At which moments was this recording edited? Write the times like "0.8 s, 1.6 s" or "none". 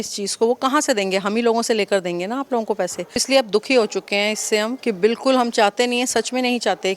3.2 s, 4.8 s